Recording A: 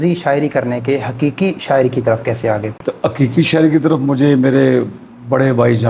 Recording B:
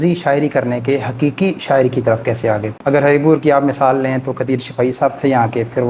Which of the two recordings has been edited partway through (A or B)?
B